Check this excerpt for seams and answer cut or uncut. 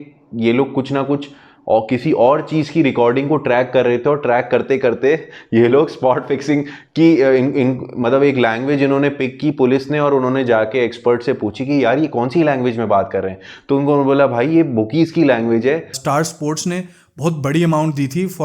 cut